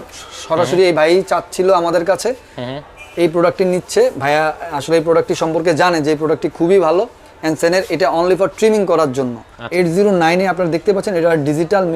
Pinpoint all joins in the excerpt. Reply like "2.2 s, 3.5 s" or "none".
9.6 s